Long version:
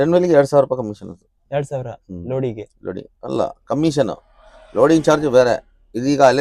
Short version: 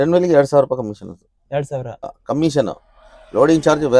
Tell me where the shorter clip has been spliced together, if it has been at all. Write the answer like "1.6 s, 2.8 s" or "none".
2.2 s